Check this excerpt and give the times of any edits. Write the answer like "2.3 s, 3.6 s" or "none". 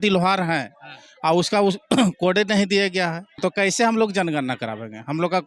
3.4 s